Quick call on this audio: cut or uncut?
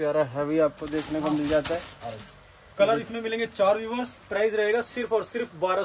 uncut